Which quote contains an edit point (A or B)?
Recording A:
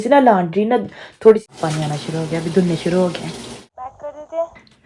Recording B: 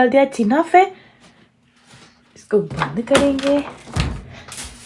A